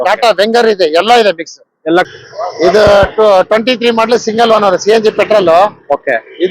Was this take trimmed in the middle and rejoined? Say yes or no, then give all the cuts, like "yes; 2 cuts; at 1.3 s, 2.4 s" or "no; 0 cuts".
yes; 1 cut; at 2.1 s